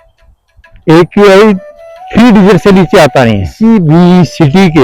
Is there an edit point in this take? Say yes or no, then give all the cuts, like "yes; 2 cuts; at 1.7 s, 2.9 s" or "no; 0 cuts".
yes; 1 cut; at 3.5 s